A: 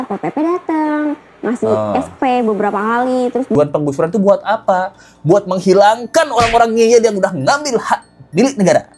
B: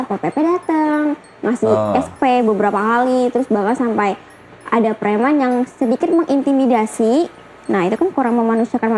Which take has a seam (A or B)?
A